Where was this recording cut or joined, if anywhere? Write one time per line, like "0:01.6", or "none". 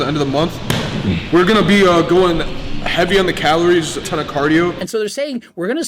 0:04.1
0:04.8